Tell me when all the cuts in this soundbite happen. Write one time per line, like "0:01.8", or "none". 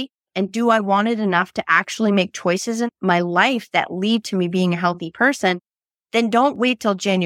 0:03.0